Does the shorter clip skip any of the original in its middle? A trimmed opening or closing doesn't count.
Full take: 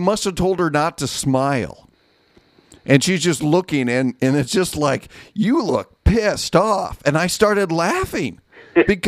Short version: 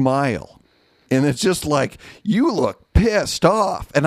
yes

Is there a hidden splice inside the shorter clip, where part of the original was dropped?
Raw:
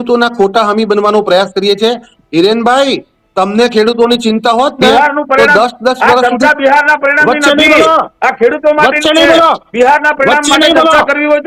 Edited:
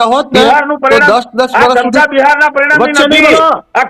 no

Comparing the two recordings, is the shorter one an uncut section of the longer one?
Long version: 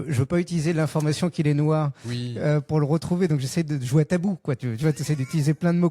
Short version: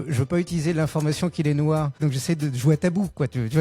no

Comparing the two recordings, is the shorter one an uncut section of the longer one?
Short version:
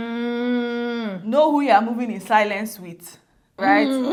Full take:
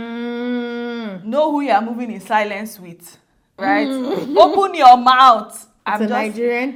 yes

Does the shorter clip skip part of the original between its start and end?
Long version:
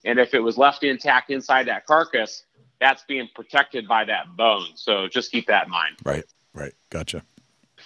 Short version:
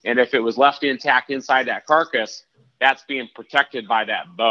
no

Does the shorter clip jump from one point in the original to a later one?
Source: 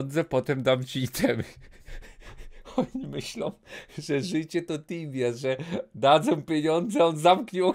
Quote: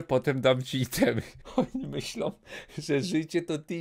yes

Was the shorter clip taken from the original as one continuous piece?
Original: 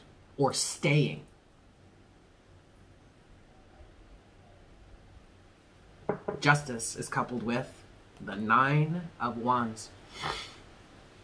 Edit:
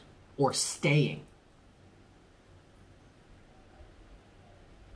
yes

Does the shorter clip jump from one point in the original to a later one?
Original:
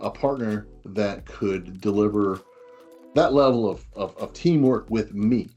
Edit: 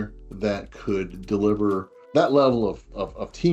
yes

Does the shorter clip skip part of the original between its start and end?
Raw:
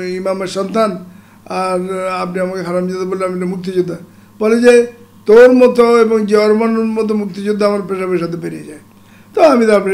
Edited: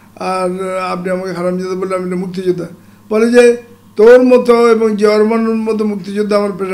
no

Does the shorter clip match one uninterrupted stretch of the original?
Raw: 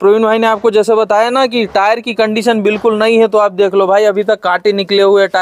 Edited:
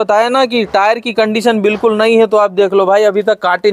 yes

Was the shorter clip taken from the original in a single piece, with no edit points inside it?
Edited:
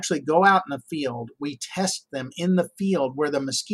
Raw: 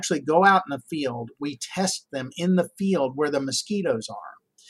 yes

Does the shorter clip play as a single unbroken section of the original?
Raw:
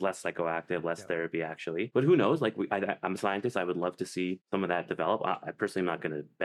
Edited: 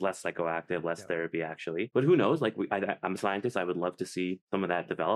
yes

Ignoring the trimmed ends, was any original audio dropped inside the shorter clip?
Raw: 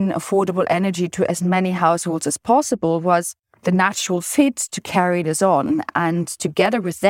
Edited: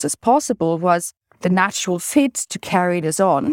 no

